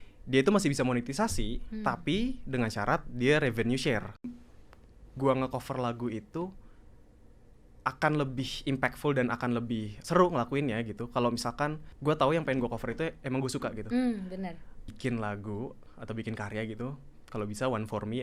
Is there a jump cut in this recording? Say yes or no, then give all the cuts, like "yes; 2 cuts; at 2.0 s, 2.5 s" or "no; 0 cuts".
yes; 4 cuts; at 4.4 s, 9.9 s, 11.9 s, 14.9 s